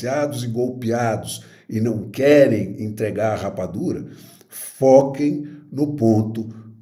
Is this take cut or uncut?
uncut